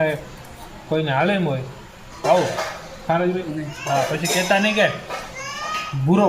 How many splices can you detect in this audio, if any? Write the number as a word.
one